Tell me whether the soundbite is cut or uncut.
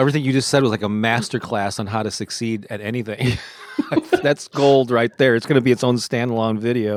uncut